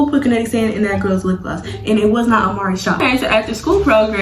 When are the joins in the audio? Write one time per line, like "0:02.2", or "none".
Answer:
0:03.0